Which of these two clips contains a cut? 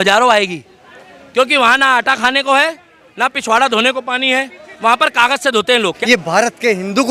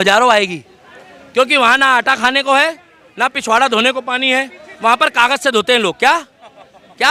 first; 1 cut; at 6.0 s

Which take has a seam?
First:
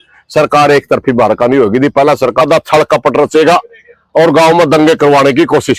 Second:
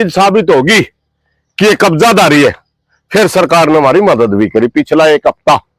first; 1 cut; at 2.4 s

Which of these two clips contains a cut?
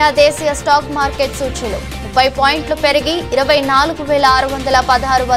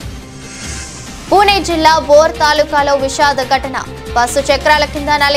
second; 1 cut; at 1.1 s

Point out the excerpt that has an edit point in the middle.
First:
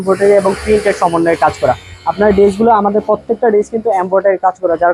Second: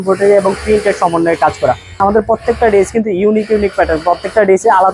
second; 1 cut; at 2.0 s

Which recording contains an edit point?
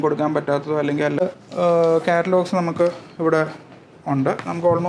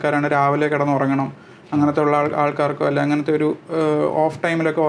first; 1 cut; at 1.2 s

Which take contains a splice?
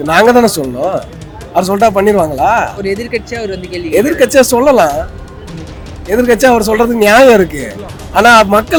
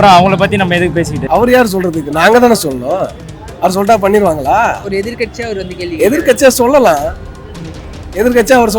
second; 1 cut; at 1.2 s

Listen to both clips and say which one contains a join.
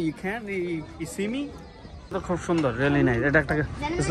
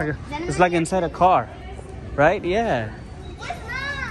first; 1 cut; at 2.1 s

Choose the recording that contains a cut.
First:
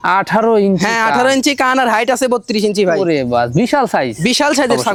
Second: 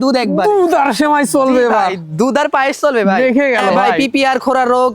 second; 1 cut; at 3.8 s

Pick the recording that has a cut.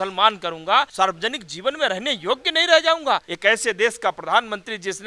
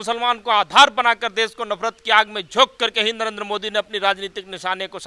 first; 2 cuts; at 0.9 s, 3.3 s

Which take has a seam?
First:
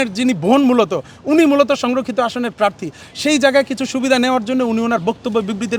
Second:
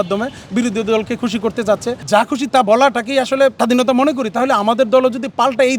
second; 2 cuts; at 1.9 s, 3.6 s

